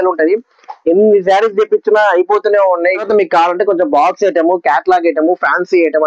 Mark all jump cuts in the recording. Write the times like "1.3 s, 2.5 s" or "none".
3.0 s